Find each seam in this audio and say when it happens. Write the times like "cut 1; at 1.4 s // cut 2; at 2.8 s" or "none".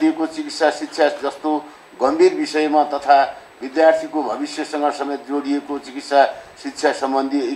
none